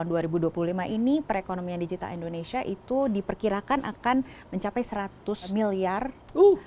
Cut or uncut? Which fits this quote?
uncut